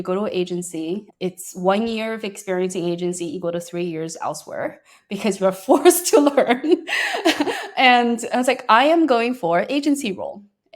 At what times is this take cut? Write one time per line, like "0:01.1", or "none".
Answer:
0:01.1